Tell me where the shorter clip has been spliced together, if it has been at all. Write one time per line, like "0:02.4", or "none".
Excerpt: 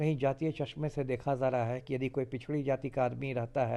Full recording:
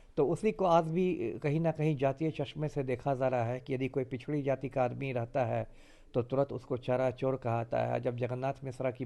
none